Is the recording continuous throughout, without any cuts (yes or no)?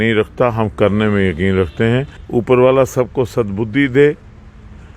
no